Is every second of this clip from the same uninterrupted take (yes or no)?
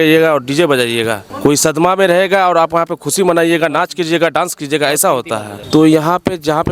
no